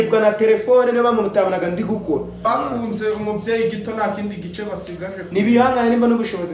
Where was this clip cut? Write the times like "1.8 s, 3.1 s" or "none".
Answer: 2.5 s